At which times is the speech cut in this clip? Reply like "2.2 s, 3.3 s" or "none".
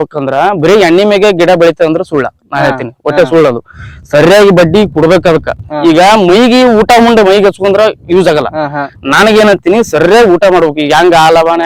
none